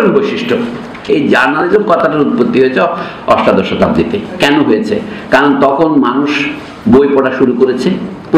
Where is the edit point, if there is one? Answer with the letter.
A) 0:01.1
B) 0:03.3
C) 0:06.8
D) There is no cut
A